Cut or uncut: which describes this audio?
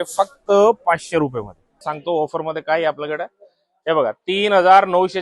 cut